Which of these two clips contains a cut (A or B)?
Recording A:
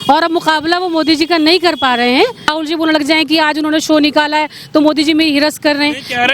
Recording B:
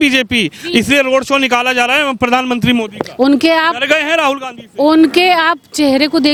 A